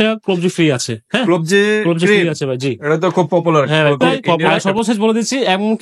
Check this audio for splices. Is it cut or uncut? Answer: cut